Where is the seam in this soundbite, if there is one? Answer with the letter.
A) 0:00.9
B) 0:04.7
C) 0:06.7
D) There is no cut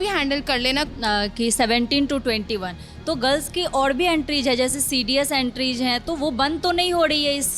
A